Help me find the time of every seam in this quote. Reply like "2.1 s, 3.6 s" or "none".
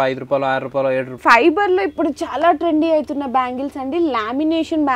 1.2 s